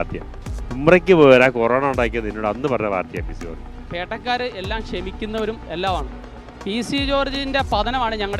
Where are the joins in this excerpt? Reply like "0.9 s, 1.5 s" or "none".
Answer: 3.8 s